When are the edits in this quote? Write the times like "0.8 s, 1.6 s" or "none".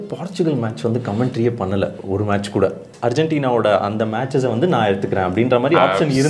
2.9 s